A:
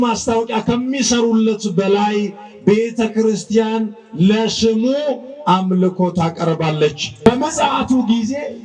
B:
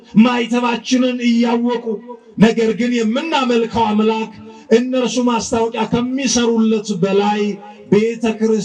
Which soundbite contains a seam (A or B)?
A